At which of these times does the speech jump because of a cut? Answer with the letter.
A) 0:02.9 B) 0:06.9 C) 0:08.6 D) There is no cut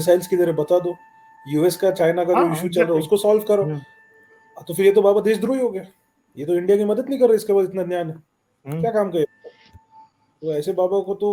D